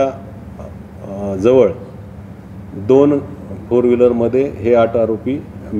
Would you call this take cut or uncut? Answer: uncut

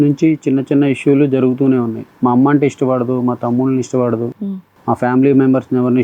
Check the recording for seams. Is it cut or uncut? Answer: cut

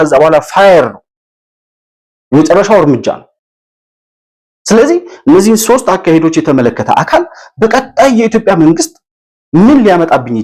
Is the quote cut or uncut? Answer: uncut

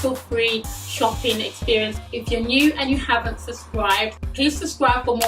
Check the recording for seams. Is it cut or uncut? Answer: cut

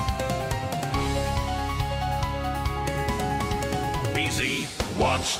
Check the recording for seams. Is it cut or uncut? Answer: uncut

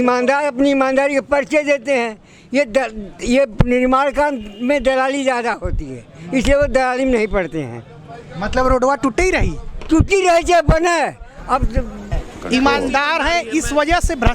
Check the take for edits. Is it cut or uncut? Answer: cut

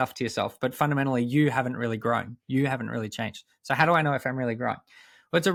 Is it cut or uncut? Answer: uncut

